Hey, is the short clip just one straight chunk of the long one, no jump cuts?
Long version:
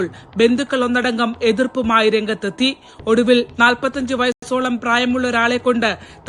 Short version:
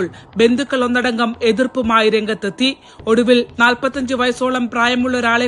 no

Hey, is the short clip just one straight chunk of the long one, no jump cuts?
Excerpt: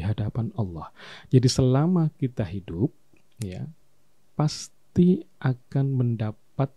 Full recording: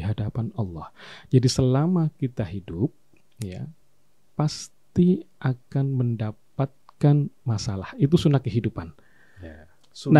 yes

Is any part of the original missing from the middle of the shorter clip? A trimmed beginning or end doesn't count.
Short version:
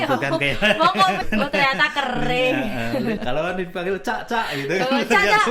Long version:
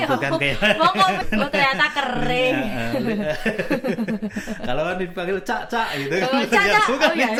yes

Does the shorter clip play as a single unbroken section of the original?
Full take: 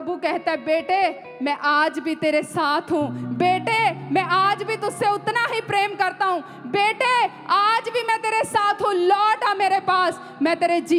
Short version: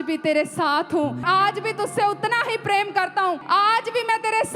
no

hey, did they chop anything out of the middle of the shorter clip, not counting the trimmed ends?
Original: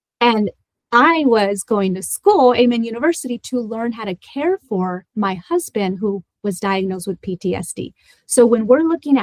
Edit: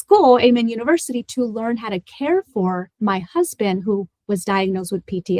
no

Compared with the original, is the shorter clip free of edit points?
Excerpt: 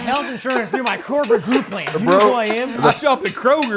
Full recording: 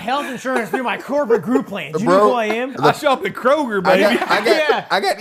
yes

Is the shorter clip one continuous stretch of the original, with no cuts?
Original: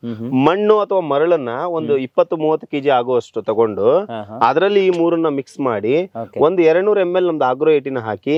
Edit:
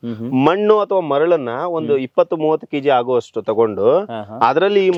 yes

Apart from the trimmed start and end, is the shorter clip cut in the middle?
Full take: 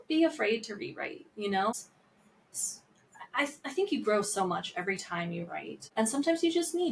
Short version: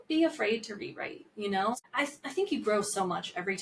yes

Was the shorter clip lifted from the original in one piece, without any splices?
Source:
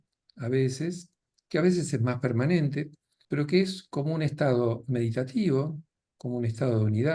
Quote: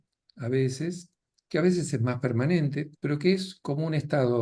no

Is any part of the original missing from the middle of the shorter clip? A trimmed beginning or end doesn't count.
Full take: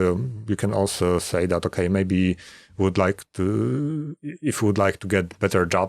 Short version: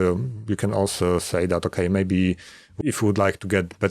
yes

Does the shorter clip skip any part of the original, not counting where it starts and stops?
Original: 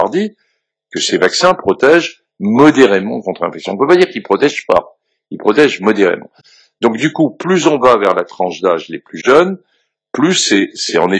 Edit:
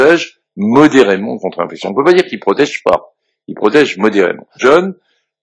yes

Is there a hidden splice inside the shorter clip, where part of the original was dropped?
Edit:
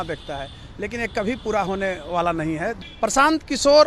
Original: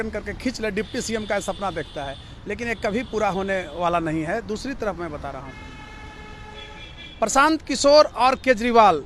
yes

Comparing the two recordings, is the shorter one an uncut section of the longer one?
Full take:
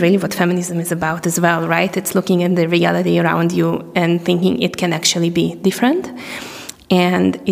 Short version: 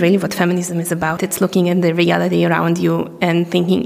no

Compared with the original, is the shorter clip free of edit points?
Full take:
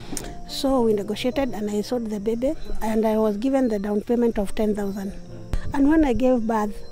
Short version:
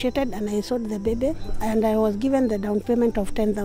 yes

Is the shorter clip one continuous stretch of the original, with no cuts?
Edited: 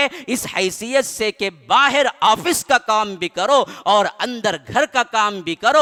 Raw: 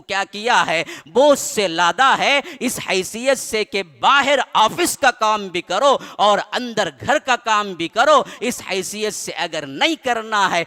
yes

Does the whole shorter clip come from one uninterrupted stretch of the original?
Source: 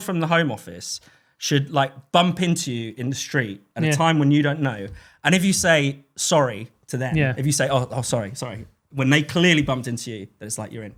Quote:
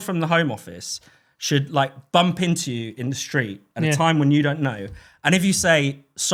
yes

